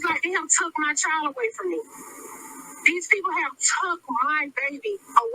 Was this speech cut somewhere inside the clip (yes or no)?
no